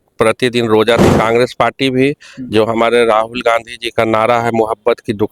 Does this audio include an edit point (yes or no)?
yes